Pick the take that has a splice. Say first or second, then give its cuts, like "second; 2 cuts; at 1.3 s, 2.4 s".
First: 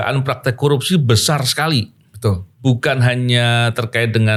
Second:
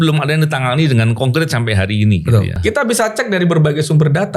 second; 1 cut; at 2.6 s